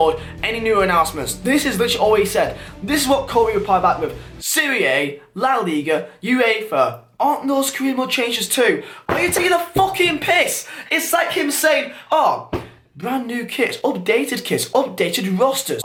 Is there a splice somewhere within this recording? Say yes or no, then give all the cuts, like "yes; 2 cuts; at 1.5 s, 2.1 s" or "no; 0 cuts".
no; 0 cuts